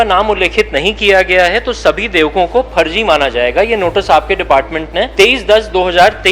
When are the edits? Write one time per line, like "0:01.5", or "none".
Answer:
0:05.1